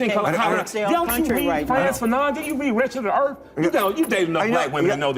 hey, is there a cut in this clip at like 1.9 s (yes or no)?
no